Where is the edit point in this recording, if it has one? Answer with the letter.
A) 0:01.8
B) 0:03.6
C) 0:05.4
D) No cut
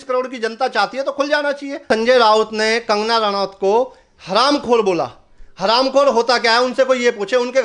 A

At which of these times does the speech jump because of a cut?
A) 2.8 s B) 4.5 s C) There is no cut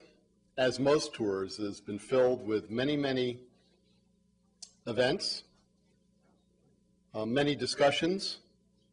A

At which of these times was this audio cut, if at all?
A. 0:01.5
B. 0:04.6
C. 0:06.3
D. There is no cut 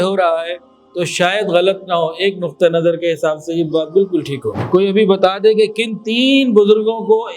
B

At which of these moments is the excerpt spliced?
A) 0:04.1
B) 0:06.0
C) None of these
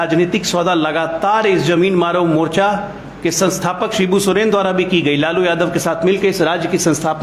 C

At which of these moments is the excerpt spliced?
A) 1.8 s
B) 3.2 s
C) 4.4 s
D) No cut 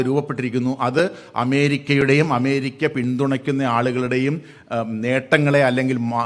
D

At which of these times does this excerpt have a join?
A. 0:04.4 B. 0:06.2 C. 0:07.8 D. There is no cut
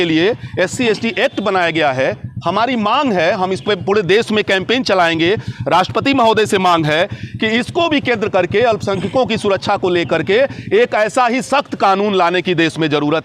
D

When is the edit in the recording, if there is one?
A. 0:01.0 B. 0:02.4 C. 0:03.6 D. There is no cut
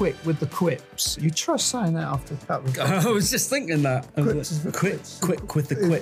A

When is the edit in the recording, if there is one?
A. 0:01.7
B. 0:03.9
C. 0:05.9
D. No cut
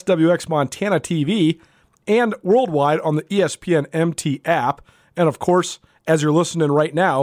D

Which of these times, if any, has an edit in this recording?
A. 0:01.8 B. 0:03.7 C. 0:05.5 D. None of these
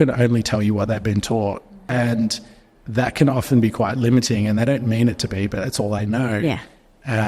A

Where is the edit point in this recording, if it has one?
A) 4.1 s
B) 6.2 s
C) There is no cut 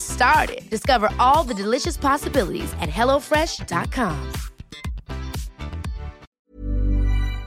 B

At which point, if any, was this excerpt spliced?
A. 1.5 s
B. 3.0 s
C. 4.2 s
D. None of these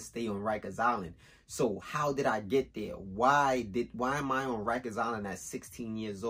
D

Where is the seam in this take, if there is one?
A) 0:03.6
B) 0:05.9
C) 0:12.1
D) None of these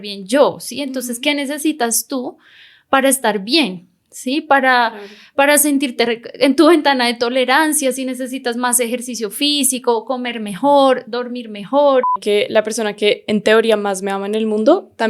C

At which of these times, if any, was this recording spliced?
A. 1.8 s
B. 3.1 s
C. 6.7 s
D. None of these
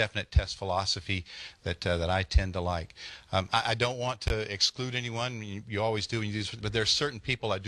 D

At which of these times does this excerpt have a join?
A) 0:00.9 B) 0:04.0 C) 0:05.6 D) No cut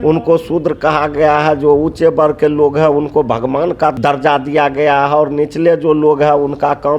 B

